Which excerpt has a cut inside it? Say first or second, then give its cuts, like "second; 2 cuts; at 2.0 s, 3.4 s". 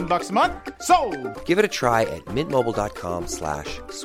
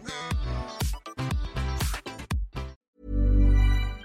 second; 1 cut; at 2.8 s